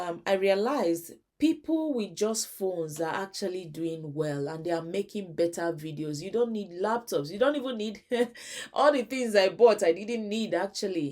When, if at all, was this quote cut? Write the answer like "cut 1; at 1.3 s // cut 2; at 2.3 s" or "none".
none